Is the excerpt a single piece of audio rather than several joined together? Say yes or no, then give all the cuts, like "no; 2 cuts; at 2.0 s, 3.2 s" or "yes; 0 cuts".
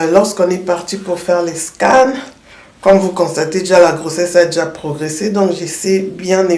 yes; 0 cuts